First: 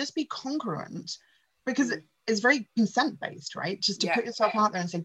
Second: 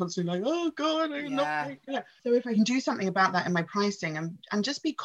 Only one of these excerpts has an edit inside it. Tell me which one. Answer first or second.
second